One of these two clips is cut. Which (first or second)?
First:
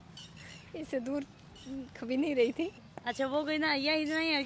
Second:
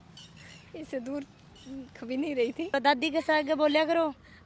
second